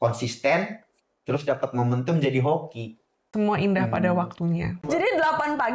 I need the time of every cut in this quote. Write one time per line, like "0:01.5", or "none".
0:03.3
0:04.8